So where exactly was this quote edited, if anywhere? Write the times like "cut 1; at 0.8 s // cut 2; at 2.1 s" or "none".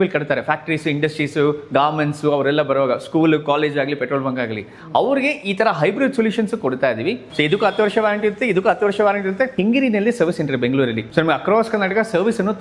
cut 1; at 7.2 s // cut 2; at 9.5 s // cut 3; at 11.0 s